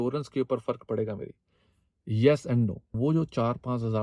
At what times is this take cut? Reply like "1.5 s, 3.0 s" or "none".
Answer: 2.8 s

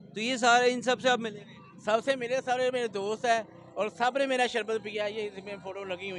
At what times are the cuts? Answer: none

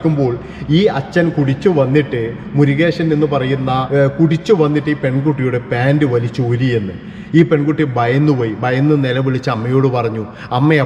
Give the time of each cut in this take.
3.8 s

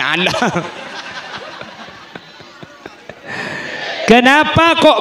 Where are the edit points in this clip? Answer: 3.8 s

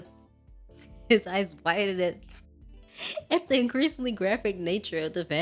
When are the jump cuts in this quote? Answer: none

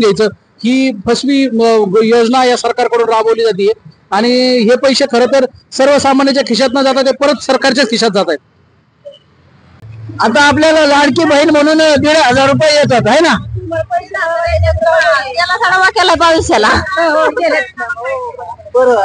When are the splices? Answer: 9.8 s

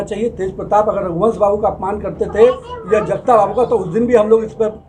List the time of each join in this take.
none

